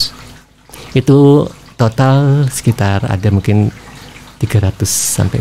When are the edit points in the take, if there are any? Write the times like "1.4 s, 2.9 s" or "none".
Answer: none